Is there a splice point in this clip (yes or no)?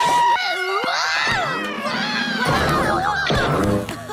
yes